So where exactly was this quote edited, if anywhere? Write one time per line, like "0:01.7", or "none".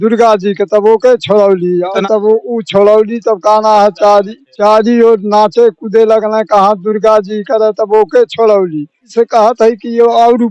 0:02.0
0:09.1